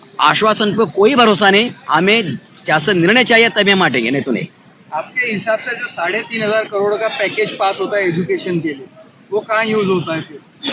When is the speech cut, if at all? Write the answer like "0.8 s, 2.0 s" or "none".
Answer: none